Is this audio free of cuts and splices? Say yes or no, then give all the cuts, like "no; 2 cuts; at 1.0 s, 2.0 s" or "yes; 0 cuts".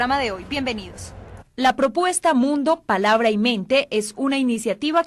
yes; 0 cuts